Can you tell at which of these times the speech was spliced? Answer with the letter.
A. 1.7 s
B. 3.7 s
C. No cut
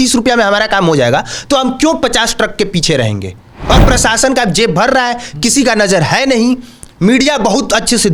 C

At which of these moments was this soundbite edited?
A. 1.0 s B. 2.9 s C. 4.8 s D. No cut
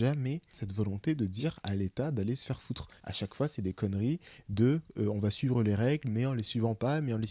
B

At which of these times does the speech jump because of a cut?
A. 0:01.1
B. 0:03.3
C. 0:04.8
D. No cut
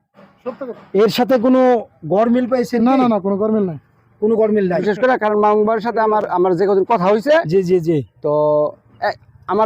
C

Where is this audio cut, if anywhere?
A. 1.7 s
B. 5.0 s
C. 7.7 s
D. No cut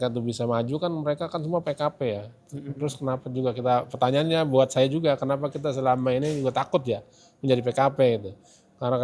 D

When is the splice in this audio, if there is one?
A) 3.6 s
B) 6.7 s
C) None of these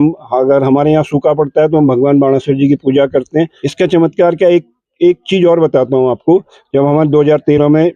A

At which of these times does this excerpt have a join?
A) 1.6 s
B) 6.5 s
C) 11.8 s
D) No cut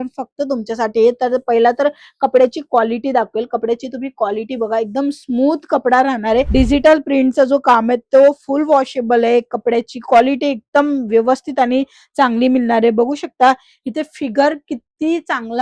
B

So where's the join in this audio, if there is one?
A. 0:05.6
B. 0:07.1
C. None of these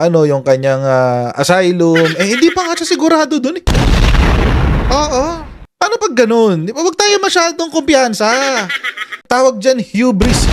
C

